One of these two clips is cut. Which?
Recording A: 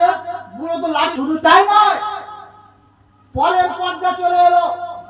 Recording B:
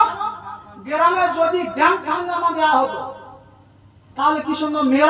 A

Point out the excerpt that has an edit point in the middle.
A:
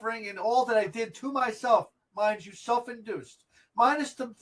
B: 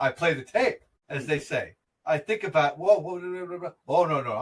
B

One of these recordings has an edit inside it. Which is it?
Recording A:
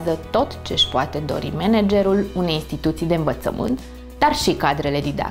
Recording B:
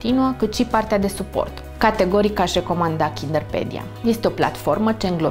B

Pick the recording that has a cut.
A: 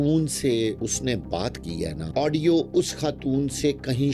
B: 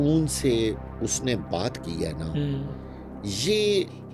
A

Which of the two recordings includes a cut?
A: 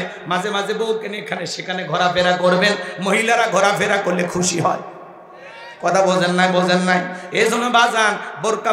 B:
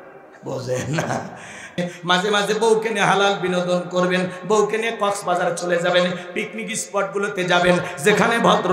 B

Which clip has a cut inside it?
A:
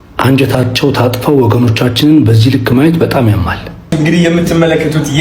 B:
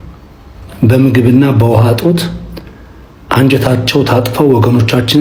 A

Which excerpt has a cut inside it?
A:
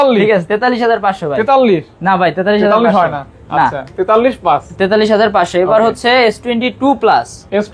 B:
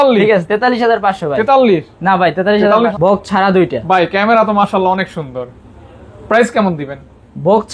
B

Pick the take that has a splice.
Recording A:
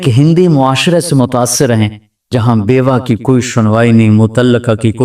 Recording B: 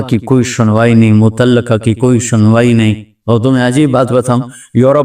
B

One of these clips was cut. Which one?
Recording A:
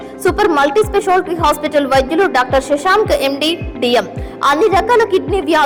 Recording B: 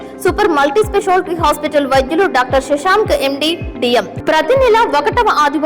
B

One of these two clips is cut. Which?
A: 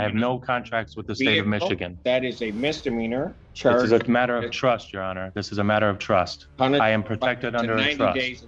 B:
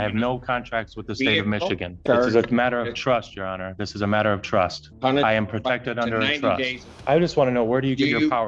B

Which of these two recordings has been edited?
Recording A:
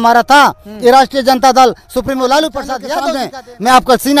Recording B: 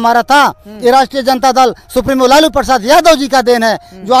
A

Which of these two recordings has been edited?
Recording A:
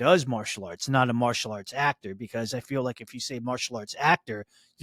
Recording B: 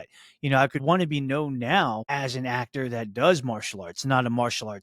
B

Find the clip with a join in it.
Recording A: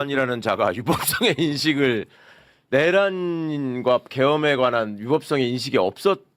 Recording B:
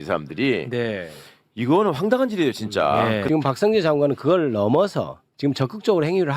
B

